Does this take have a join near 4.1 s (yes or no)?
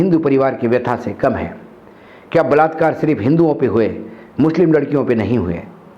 no